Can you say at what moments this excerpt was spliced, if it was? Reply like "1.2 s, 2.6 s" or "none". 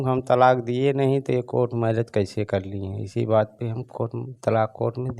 none